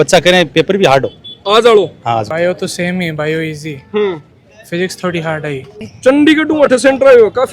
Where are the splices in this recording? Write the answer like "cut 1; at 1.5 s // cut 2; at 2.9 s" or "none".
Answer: cut 1; at 2.3 s // cut 2; at 5.8 s